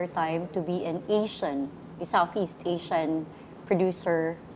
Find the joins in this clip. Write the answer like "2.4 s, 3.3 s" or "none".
none

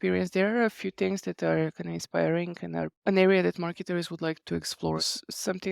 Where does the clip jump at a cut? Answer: 2.9 s, 4.7 s

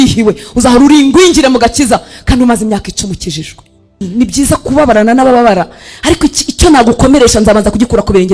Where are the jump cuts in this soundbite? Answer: 4.0 s

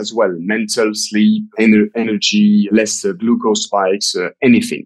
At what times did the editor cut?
1.5 s, 2.6 s

